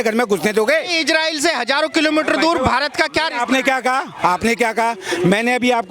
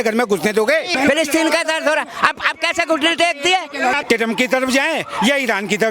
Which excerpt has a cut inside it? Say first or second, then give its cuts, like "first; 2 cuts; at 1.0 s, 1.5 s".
second; 2 cuts; at 0.9 s, 4.0 s